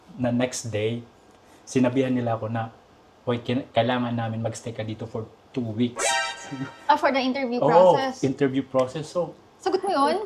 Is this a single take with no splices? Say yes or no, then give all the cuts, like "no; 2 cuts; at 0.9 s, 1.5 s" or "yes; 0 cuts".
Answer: yes; 0 cuts